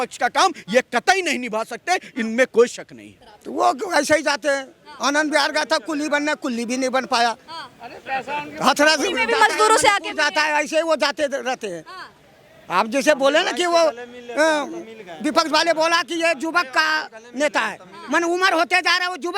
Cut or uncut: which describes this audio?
cut